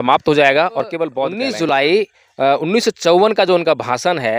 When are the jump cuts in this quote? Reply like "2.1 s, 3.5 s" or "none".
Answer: 1.3 s